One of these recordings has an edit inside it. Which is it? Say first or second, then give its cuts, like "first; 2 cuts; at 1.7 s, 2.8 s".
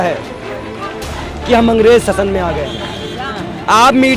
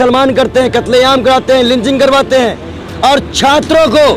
first; 1 cut; at 3.2 s